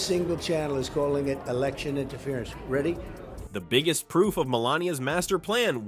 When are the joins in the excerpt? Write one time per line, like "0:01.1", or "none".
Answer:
none